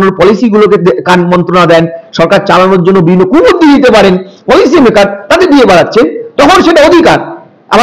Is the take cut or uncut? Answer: uncut